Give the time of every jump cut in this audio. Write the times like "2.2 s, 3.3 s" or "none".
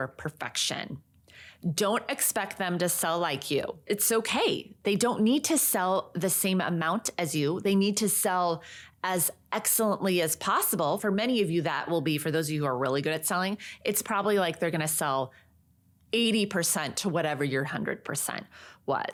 none

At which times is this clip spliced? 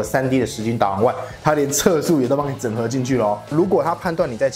3.6 s

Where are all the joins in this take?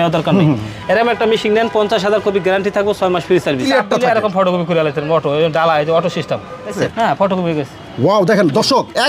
3.6 s, 6.9 s

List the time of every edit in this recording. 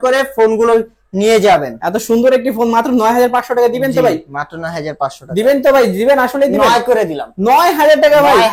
1.8 s

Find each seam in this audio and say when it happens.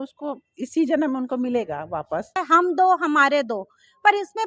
2.4 s

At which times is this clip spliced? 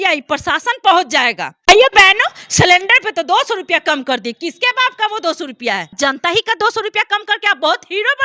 1.5 s, 5.9 s

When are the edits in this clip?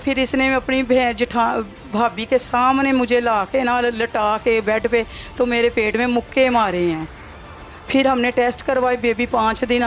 none

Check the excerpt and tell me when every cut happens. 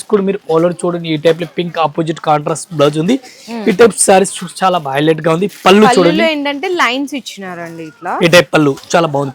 none

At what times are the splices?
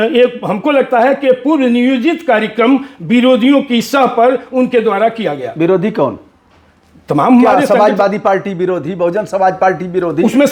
none

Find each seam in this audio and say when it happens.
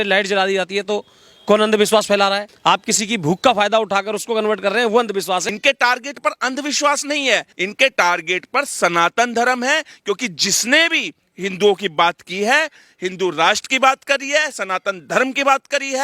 2.5 s, 5.5 s, 7.6 s

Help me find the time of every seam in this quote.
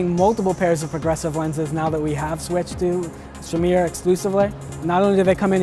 4.7 s

